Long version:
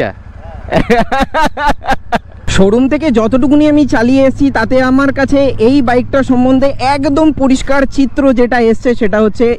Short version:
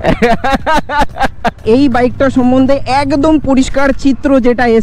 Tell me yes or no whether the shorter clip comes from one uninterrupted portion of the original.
no